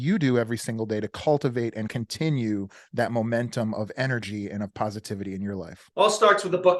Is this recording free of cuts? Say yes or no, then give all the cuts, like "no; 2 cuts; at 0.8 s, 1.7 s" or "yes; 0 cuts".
no; 2 cuts; at 1.9 s, 5.8 s